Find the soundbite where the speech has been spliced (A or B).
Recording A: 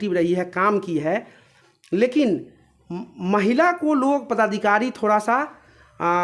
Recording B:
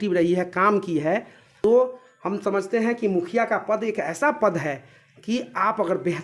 B